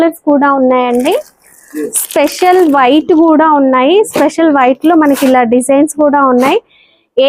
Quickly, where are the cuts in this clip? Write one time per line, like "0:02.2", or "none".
none

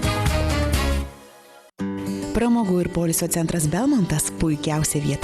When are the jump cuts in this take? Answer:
0:01.2

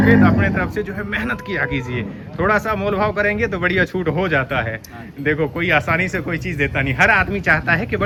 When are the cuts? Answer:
none

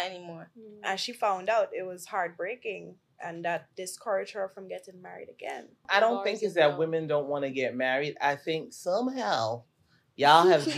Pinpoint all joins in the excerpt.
0:05.8

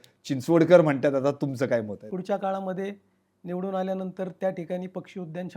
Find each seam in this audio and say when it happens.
0:02.1

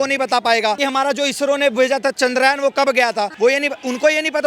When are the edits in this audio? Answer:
0:00.8
0:03.3

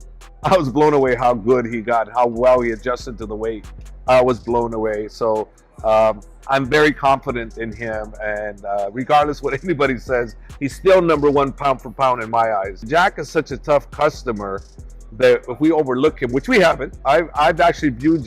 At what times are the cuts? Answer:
0:12.7

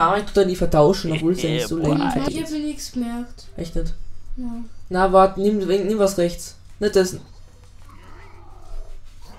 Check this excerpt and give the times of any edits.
0:02.3

